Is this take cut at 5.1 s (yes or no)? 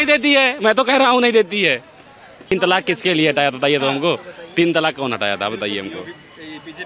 no